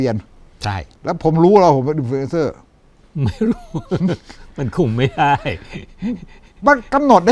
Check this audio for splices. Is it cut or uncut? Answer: uncut